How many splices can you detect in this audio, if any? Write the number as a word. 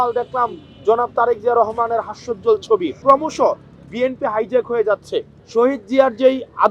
two